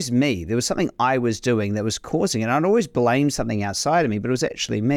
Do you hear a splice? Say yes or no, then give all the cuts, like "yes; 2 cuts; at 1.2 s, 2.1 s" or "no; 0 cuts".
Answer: no; 0 cuts